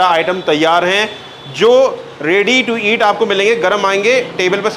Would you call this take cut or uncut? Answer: uncut